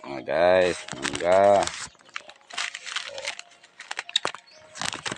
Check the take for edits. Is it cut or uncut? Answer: uncut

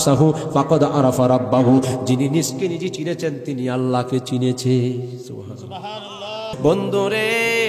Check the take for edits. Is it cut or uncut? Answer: cut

